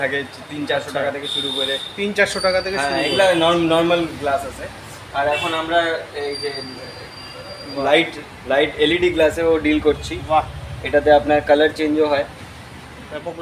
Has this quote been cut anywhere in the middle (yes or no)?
no